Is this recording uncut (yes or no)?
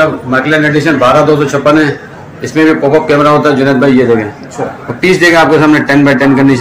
yes